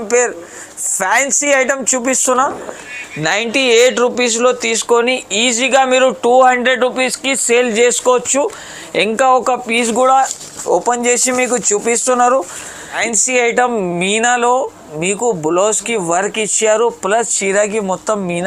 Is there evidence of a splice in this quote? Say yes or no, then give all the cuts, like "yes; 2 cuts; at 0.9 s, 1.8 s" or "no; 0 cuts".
yes; 2 cuts; at 3.0 s, 13.0 s